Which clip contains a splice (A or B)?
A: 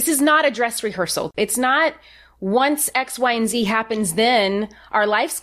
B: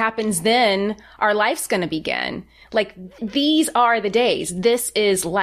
A